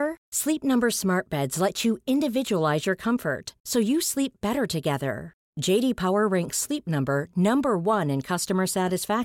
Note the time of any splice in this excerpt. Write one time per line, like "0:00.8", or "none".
none